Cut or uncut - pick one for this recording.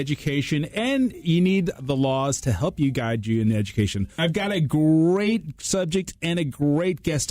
cut